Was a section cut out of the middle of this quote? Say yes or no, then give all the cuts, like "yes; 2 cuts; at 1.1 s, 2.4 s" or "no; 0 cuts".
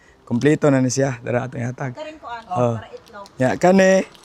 no; 0 cuts